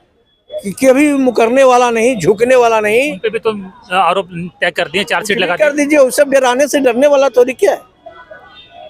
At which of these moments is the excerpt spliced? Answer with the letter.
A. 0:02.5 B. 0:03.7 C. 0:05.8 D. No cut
D